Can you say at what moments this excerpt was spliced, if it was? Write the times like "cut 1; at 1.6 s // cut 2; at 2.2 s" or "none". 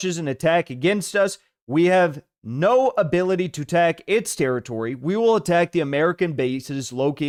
none